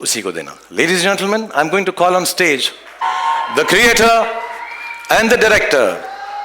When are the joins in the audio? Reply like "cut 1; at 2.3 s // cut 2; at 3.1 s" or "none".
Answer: cut 1; at 3.0 s